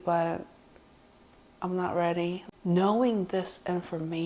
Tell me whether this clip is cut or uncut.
cut